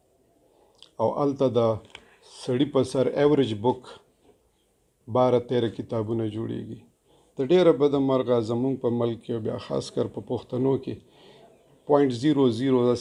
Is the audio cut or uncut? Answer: uncut